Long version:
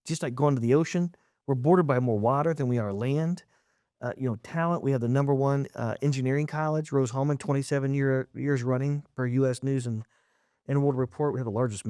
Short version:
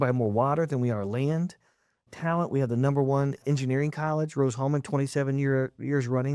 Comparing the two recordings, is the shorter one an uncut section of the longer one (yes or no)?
no